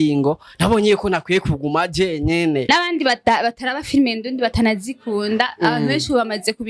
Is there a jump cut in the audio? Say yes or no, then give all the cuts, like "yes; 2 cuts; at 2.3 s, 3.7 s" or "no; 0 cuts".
yes; 1 cut; at 2.7 s